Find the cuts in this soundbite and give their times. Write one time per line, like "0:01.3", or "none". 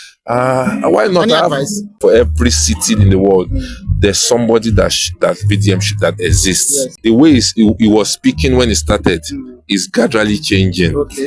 0:02.0
0:06.9